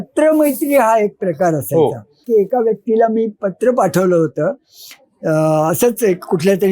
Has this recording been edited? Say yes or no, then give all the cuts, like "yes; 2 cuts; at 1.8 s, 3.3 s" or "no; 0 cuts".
yes; 1 cut; at 2.2 s